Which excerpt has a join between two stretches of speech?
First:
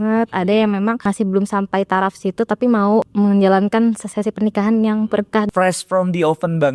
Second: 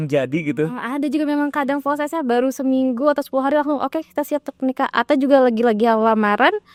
first; 3 cuts; at 1.0 s, 3.1 s, 5.5 s

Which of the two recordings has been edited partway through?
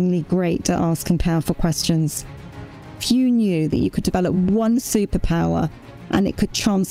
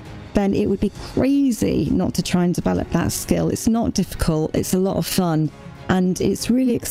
first; 1 cut; at 2.7 s

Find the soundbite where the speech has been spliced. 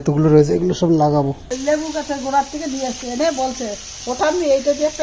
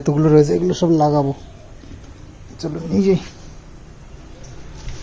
first; 1 cut; at 1.6 s

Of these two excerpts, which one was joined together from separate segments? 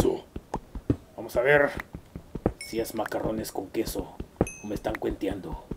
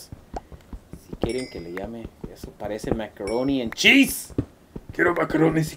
first; 1 cut; at 4.2 s

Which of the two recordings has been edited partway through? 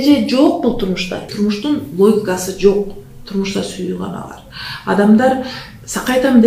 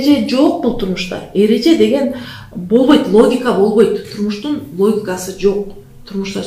first; 1 cut; at 1.2 s

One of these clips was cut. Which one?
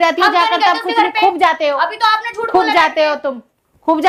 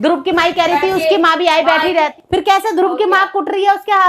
second; 1 cut; at 2.2 s

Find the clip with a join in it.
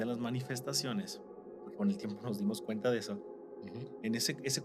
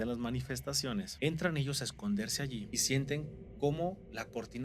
second; 2 cuts; at 1.1 s, 2.7 s

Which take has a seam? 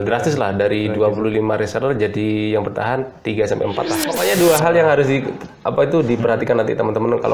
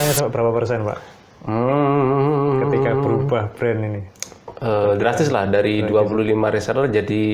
first; 1 cut; at 4.1 s

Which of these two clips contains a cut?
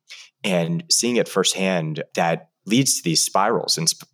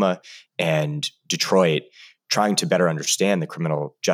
first; 1 cut; at 2.0 s

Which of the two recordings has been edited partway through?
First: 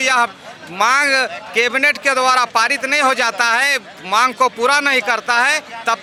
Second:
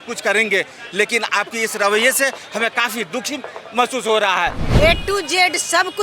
second; 1 cut; at 4.6 s

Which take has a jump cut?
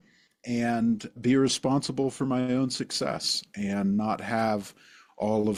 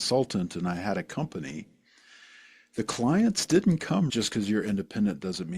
second; 1 cut; at 4.1 s

